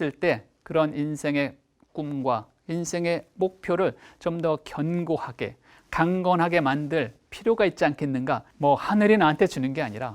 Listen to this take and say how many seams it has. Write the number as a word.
one